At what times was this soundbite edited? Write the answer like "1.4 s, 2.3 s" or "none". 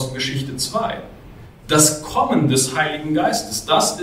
none